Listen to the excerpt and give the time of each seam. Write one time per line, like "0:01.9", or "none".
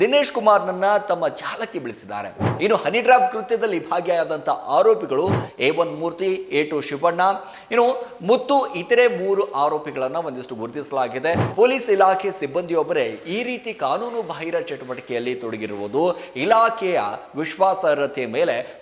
0:02.5
0:11.5